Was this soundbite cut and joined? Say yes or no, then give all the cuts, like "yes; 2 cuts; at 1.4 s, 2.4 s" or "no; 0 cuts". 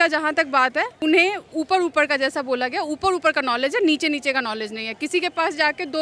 yes; 1 cut; at 0.9 s